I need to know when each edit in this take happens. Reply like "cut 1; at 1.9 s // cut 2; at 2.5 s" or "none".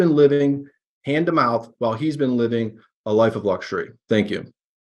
none